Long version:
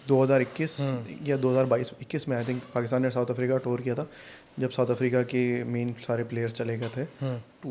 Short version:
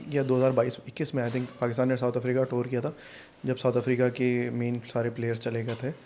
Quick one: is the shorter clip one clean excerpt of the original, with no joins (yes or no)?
yes